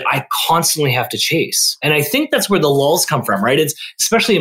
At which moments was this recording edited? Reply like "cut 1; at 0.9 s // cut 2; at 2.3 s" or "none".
cut 1; at 1.8 s

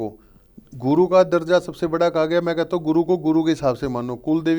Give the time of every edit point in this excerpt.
none

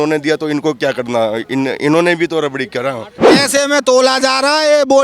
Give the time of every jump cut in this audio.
cut 1; at 3.1 s

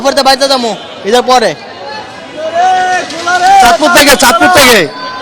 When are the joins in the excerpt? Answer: none

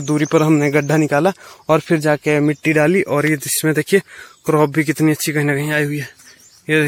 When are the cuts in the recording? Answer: none

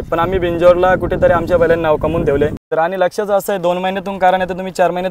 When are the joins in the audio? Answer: cut 1; at 2.6 s

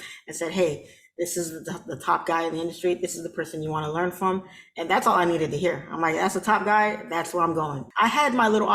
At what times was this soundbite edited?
cut 1; at 7.8 s

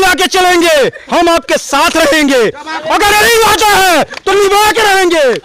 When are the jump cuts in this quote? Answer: none

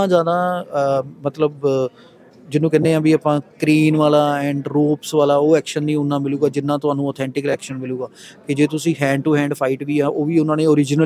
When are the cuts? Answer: none

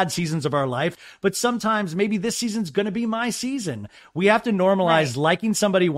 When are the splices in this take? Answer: cut 1; at 0.9 s

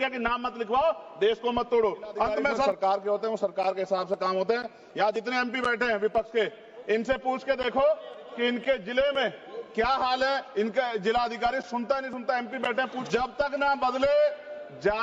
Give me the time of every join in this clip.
cut 1; at 2.7 s // cut 2; at 13.0 s

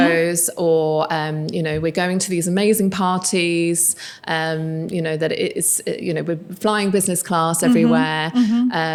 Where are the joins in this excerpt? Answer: none

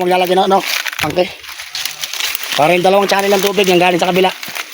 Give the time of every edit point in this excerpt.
none

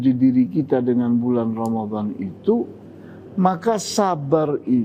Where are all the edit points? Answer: none

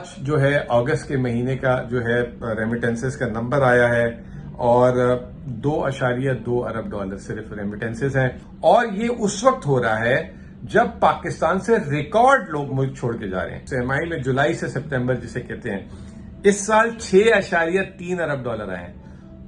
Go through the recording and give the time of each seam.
cut 1; at 8.4 s // cut 2; at 13.6 s

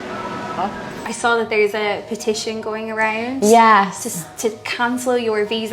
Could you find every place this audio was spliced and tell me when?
cut 1; at 1.0 s

